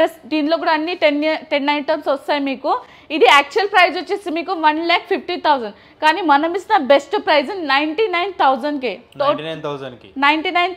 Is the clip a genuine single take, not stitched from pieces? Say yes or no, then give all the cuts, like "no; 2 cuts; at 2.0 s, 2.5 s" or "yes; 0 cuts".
yes; 0 cuts